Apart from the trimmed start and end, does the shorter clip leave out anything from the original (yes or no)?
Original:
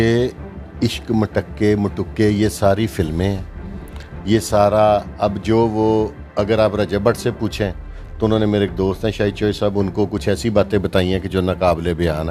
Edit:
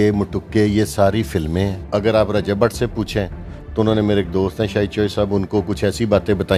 yes